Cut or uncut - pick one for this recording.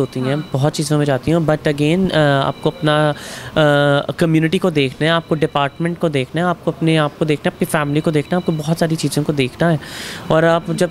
uncut